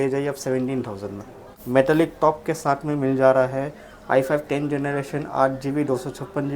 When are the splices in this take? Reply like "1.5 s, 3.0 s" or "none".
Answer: 1.5 s